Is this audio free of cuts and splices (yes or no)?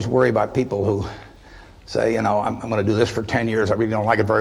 yes